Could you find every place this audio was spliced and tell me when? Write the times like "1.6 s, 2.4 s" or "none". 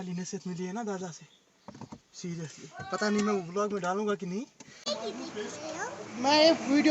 4.8 s